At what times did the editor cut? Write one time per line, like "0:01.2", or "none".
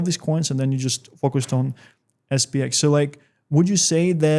none